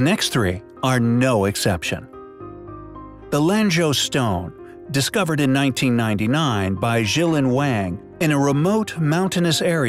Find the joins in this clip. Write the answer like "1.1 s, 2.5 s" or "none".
7.1 s

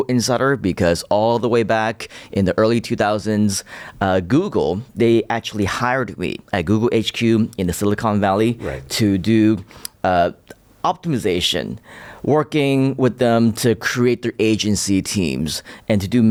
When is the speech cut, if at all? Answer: none

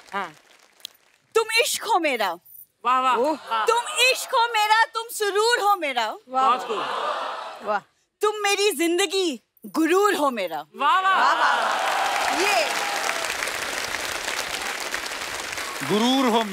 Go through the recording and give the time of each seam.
none

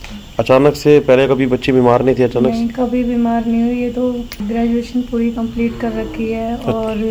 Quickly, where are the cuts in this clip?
4.4 s

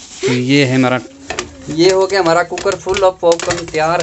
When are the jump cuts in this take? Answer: 1.1 s

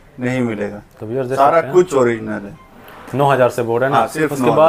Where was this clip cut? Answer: none

